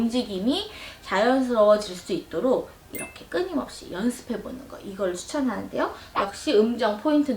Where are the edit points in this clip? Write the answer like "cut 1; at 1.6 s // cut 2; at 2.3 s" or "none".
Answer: cut 1; at 6.0 s